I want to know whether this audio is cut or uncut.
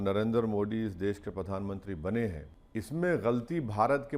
cut